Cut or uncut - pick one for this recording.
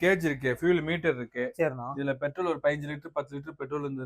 uncut